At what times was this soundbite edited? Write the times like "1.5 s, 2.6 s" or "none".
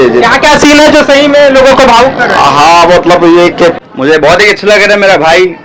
3.8 s

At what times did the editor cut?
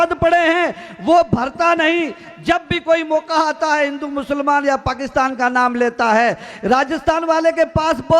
none

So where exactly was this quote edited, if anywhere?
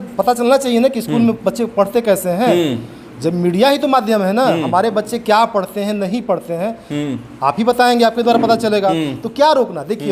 none

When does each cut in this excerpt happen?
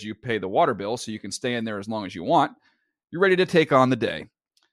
none

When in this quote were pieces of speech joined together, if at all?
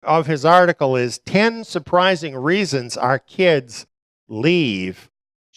3.3 s

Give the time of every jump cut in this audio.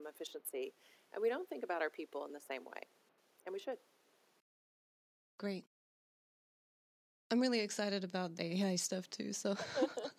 none

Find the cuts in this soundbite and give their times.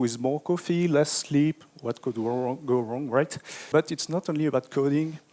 3.6 s

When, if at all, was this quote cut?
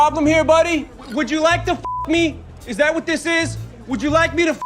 1.0 s, 3.7 s

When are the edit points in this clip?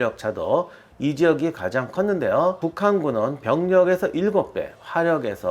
2.6 s

